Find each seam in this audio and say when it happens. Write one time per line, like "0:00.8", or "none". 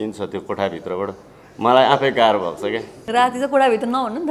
0:03.1

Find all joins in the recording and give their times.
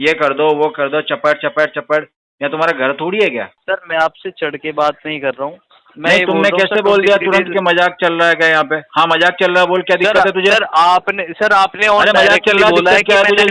0:03.6

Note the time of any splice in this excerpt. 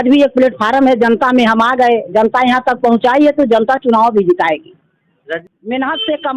0:05.2

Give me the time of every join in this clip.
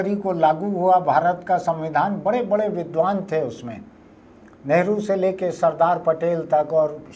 none

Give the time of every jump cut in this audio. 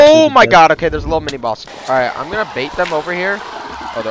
0:01.6

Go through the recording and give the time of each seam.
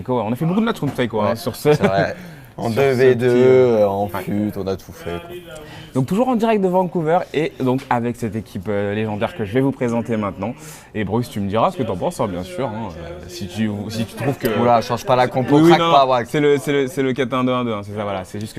0:12.0

